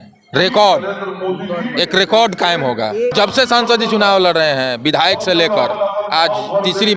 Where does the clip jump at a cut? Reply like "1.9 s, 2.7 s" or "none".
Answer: 3.1 s